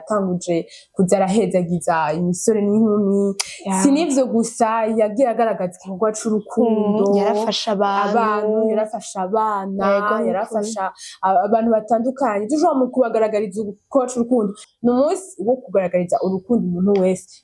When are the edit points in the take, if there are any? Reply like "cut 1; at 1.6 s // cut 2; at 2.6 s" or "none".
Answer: cut 1; at 14.6 s